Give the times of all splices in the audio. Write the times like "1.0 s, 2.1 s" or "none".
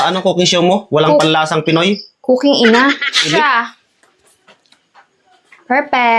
3.3 s